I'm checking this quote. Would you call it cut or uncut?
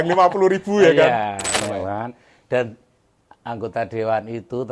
cut